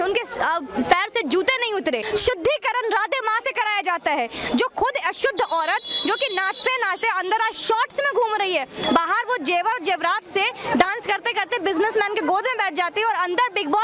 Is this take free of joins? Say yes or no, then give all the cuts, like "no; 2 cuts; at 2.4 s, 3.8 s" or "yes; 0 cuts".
no; 1 cut; at 2.0 s